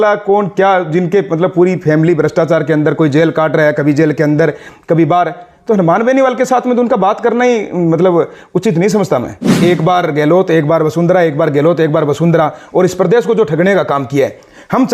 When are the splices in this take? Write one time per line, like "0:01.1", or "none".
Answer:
0:09.4

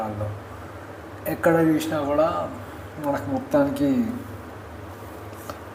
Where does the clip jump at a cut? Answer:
none

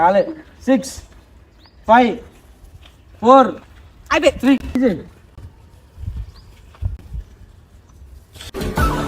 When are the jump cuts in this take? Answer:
0:04.8

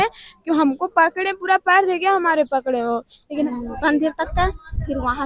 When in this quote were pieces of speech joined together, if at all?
0:03.2

